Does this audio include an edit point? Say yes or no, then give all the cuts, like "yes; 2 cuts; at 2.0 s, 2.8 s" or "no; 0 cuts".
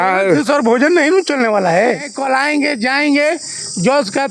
yes; 1 cut; at 2.1 s